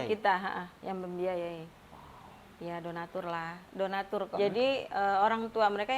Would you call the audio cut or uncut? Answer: cut